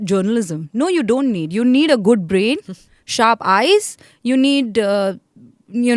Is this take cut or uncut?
uncut